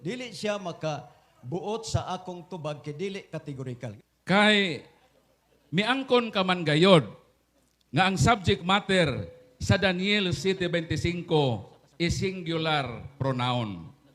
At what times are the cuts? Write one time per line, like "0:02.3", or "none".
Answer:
0:03.9